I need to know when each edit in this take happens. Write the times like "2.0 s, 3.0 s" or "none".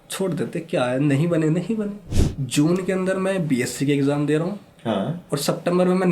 2.1 s